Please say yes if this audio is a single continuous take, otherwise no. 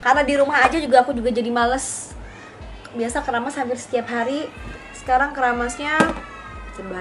yes